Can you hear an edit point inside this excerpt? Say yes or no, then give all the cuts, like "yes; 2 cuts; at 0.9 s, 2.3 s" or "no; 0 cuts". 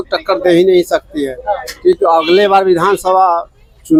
no; 0 cuts